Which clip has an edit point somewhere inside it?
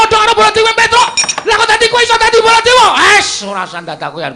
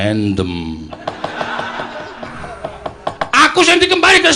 second; 1 cut; at 2.4 s

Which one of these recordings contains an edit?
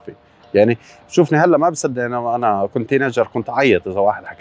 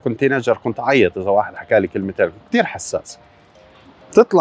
second; 1 cut; at 3.2 s

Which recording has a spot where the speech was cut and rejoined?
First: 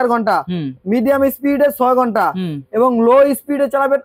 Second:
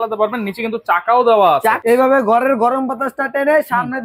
second; 1 cut; at 1.8 s

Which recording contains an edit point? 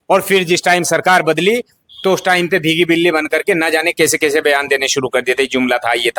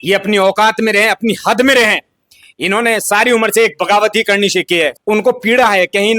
second; 1 cut; at 4.9 s

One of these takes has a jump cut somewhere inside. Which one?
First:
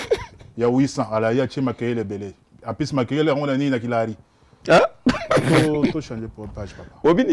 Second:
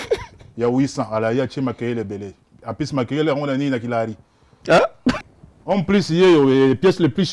second; 1 cut; at 5.2 s

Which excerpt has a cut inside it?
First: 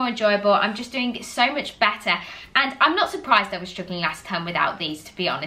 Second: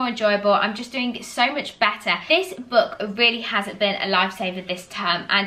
second; 1 cut; at 2.2 s

